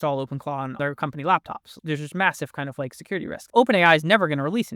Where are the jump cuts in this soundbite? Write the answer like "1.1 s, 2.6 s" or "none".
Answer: 0.7 s, 1.7 s, 3.4 s

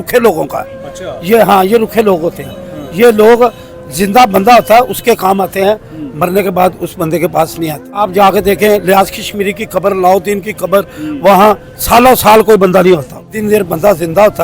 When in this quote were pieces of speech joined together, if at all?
8.0 s, 13.2 s

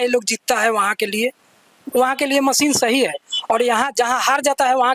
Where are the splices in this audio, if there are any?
none

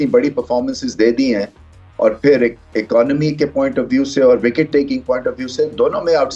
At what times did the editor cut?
none

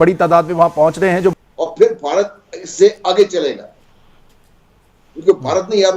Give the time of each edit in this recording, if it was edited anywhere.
1.4 s

